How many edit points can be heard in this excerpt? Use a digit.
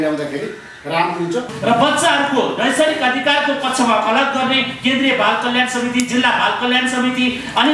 1